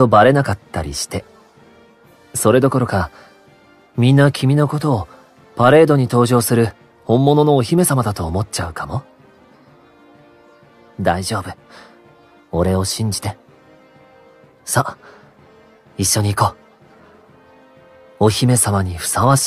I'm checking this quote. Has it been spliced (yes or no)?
no